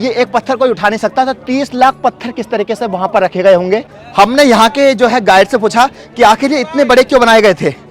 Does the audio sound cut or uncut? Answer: uncut